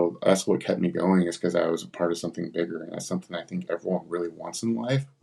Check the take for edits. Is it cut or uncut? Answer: uncut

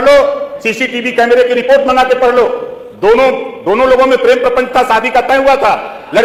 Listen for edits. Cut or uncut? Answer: uncut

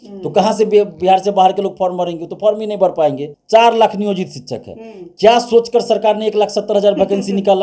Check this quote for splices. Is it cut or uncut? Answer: cut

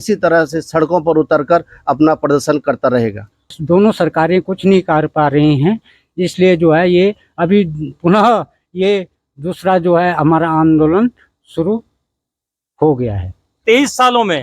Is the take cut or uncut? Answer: cut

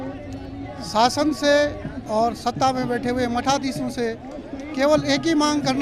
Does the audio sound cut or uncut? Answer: uncut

